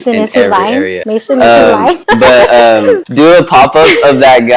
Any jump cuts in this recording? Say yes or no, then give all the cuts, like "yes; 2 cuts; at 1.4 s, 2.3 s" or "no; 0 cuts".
yes; 1 cut; at 3.1 s